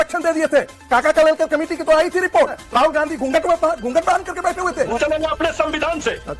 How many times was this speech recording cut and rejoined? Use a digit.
2